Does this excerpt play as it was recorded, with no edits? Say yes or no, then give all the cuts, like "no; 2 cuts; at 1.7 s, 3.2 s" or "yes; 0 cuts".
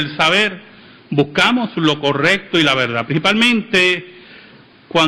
yes; 0 cuts